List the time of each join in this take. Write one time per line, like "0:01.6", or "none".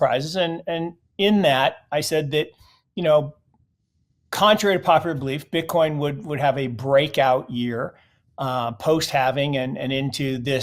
none